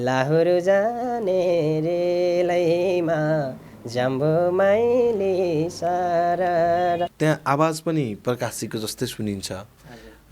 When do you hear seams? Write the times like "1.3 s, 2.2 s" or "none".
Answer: 7.1 s